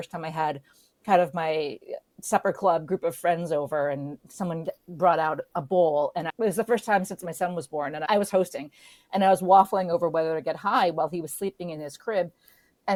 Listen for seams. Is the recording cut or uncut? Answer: uncut